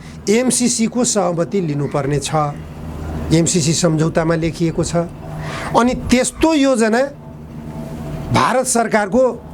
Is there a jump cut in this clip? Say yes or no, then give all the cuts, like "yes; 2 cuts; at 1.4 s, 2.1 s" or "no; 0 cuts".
no; 0 cuts